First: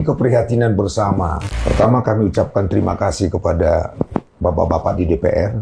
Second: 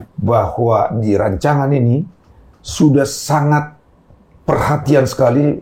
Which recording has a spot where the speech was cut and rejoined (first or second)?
first